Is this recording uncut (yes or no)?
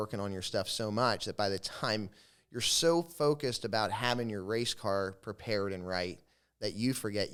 yes